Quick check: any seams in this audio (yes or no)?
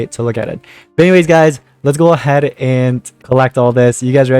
yes